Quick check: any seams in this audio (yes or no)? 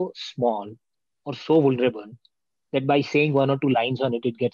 no